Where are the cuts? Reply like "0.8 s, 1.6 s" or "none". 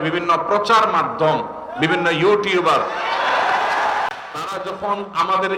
none